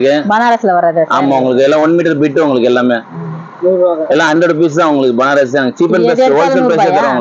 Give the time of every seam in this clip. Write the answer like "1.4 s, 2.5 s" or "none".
none